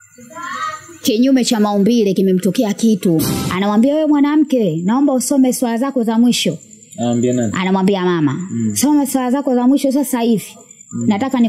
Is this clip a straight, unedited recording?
no; 1 cut; at 3.4 s

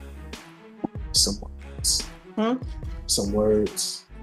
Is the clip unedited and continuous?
yes; 0 cuts

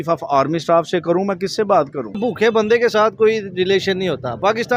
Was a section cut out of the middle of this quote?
yes; 1 cut; at 2.2 s

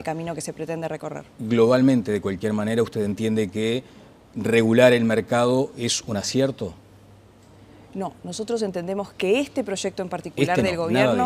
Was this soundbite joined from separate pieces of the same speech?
yes; 1 cut; at 7.9 s

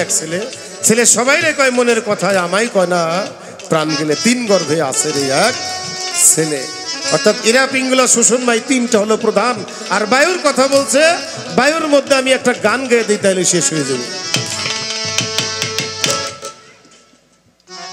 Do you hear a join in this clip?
no; 0 cuts

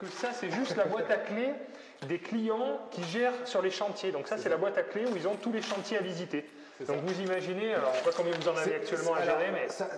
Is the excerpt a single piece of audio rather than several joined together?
yes; 0 cuts

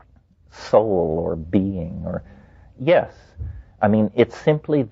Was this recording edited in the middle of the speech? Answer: yes; 1 cut; at 3.7 s

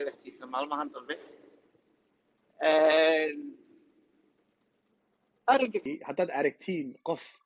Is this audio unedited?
no; 1 cut; at 5.8 s

